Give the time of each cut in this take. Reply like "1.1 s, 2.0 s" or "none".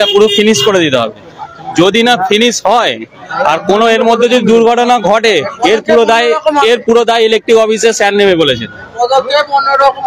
none